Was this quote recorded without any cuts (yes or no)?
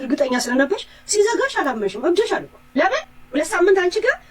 no